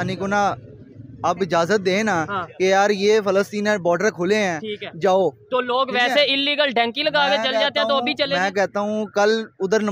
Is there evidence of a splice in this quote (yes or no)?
no